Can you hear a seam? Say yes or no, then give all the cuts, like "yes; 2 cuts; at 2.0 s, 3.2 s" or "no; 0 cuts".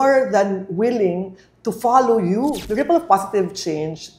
yes; 1 cut; at 2.6 s